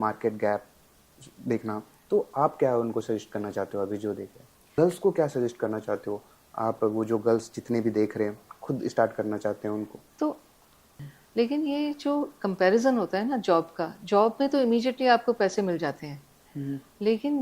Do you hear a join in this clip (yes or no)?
yes